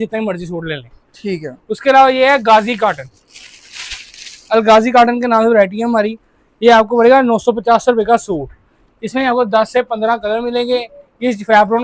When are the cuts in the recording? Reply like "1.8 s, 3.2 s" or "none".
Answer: none